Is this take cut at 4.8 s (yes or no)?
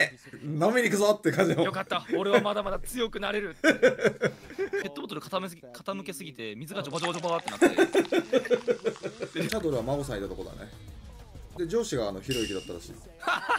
yes